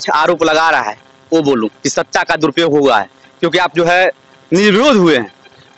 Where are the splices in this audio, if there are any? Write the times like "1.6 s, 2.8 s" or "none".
none